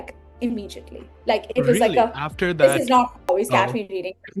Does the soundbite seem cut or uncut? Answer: cut